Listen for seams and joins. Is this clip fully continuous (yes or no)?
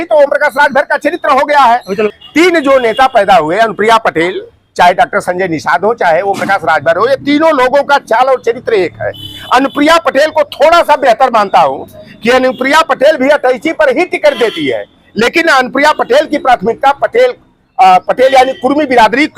no